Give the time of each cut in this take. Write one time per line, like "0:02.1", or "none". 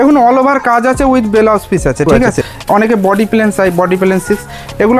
0:02.5